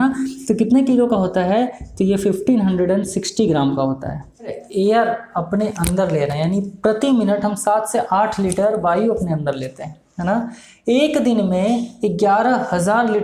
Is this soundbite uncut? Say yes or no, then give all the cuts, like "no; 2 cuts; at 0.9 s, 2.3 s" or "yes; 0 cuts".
no; 1 cut; at 4.6 s